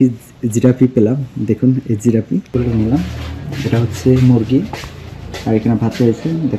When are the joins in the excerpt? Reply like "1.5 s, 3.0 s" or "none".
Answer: 2.5 s